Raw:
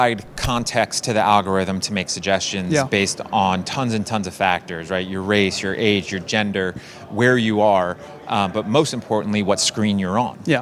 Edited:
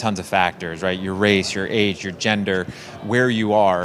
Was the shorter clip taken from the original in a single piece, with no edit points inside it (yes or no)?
yes